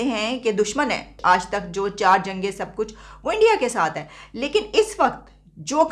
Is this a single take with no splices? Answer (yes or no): yes